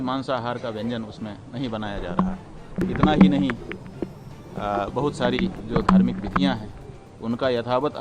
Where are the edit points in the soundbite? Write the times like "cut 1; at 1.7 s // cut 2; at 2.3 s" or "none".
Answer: cut 1; at 2.8 s